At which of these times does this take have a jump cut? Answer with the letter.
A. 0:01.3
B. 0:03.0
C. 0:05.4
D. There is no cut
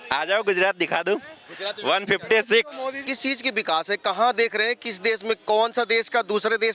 B